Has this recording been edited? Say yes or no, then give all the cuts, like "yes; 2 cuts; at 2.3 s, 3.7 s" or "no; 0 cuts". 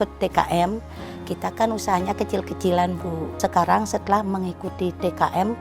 yes; 1 cut; at 3.3 s